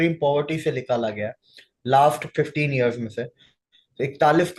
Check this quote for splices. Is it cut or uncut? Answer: uncut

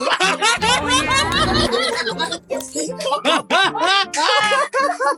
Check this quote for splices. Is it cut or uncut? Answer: uncut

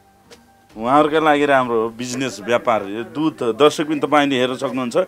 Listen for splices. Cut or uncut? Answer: uncut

